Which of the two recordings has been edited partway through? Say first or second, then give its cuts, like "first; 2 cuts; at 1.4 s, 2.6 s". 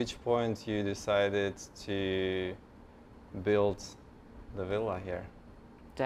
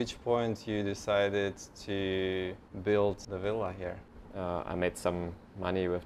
second; 2 cuts; at 2.6 s, 3.8 s